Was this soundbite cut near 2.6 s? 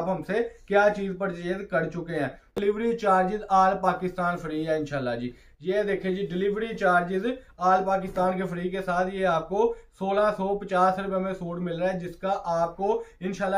yes; 1 cut; at 2.6 s

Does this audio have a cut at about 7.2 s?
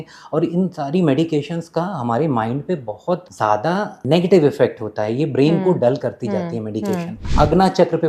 yes; 2 cuts; at 3.8 s, 7.2 s

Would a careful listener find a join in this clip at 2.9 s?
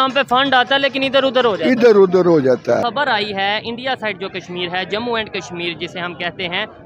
yes; 1 cut; at 2.9 s

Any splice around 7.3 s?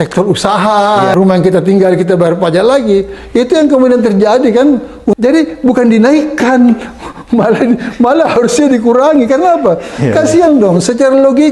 no; 2 cuts; at 1.1 s, 5.1 s

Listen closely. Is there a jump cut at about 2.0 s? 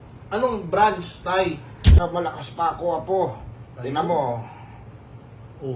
yes; 1 cut; at 2.0 s

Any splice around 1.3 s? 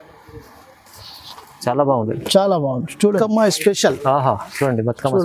no; 1 cut; at 3.2 s

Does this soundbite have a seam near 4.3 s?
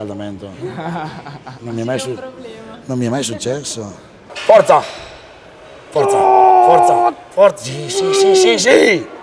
yes; 1 cut; at 4.3 s

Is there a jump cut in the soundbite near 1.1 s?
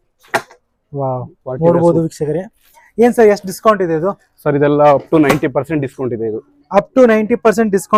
no; 0 cuts

